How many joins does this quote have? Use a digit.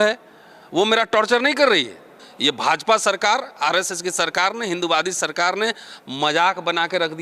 1